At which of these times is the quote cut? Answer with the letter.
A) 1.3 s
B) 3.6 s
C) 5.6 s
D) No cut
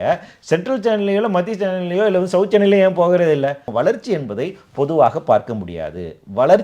B